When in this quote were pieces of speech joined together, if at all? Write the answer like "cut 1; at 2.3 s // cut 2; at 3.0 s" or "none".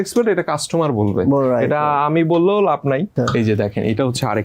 cut 1; at 3.1 s